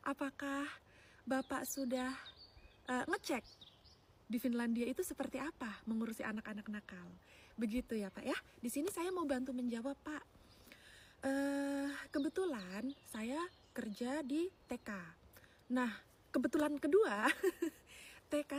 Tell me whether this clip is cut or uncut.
uncut